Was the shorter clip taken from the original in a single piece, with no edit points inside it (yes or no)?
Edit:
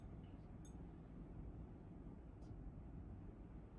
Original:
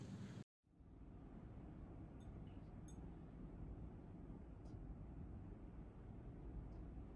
yes